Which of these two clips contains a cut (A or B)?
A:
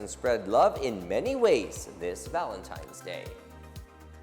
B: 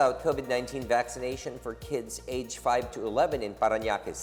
A